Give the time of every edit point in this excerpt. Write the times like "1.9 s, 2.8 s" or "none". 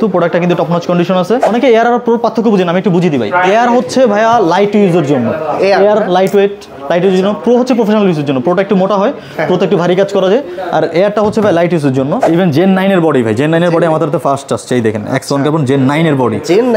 1.5 s, 12.2 s